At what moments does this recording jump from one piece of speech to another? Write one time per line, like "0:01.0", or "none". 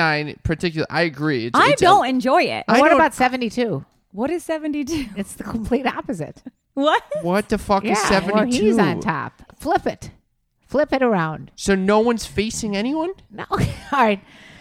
0:09.5